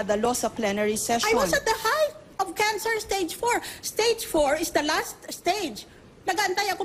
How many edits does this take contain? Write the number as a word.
one